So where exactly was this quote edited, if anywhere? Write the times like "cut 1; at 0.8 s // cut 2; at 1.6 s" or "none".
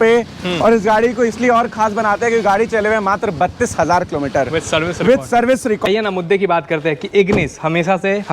cut 1; at 5.9 s